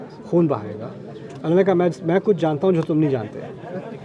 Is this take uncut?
yes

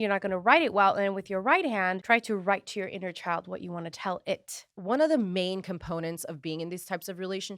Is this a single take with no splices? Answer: no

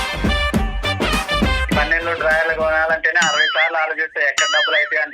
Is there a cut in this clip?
yes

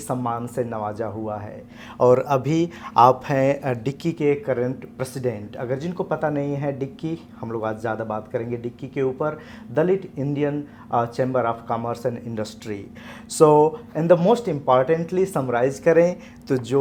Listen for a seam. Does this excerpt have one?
no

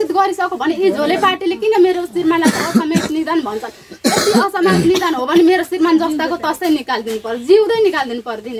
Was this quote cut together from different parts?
no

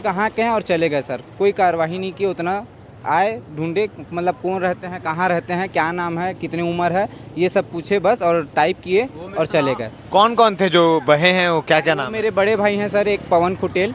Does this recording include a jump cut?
no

